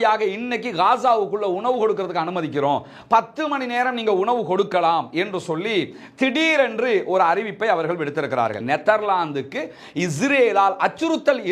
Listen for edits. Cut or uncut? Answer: cut